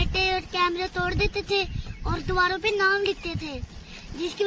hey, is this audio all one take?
yes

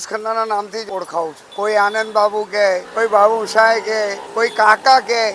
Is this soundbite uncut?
no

